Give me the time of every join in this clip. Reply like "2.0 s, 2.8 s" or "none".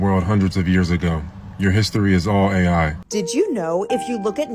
3.0 s